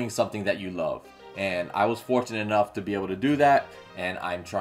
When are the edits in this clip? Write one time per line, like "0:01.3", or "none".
none